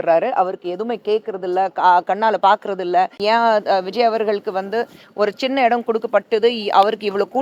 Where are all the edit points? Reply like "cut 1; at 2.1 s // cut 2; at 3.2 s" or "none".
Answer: cut 1; at 3.2 s

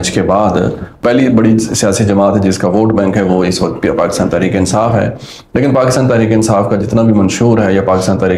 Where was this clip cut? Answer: cut 1; at 1.0 s

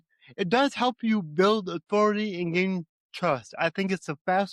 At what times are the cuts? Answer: none

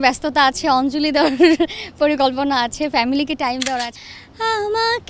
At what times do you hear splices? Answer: cut 1; at 3.9 s

